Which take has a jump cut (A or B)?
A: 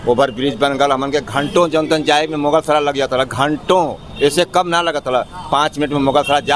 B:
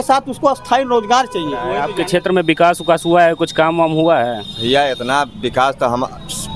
B